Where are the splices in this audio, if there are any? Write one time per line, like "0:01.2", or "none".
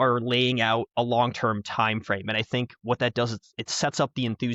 none